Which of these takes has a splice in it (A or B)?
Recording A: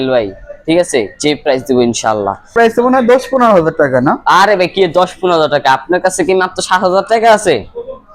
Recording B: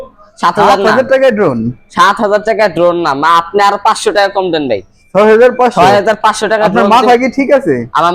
A